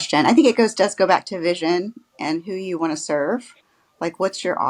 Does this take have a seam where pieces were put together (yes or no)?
no